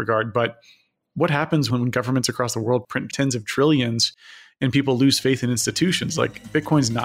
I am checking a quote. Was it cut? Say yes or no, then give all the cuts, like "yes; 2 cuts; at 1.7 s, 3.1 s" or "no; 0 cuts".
yes; 2 cuts; at 1.7 s, 3.1 s